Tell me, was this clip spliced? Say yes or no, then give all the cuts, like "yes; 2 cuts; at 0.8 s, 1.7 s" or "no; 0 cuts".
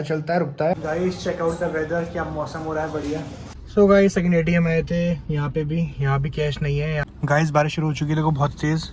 yes; 3 cuts; at 0.8 s, 3.5 s, 7.1 s